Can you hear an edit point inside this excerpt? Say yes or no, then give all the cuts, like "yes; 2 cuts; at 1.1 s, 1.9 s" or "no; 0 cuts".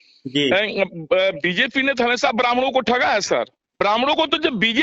yes; 1 cut; at 3.7 s